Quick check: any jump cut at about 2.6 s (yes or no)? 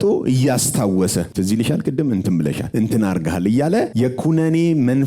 yes